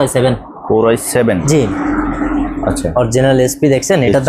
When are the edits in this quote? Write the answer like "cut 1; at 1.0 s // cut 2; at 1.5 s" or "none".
none